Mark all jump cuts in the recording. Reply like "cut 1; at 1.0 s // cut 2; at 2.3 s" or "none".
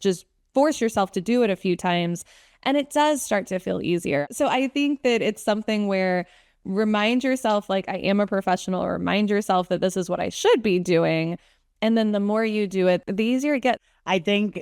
cut 1; at 4.3 s // cut 2; at 13.0 s // cut 3; at 13.8 s